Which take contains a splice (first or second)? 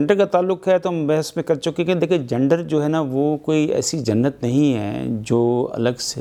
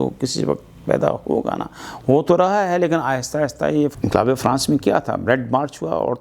second